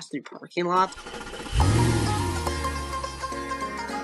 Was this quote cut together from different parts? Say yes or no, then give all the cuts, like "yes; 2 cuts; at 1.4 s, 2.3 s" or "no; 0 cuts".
yes; 1 cut; at 1.0 s